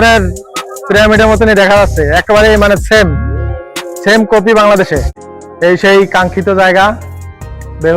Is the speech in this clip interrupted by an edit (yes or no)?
yes